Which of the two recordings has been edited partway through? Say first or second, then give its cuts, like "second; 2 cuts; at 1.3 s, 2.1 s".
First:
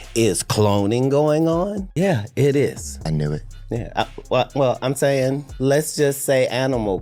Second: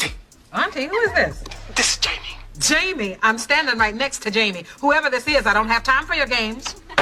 first; 3 cuts; at 1.8 s, 2.9 s, 5.5 s